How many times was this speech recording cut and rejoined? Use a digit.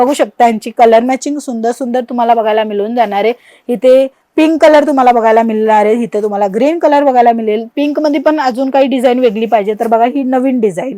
0